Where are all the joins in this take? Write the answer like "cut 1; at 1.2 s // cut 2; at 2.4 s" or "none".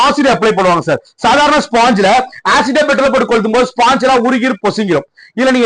none